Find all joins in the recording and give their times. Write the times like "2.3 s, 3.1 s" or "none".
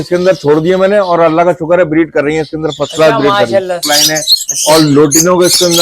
3.9 s